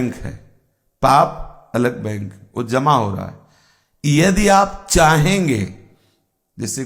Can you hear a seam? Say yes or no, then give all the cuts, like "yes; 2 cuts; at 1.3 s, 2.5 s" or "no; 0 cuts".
no; 0 cuts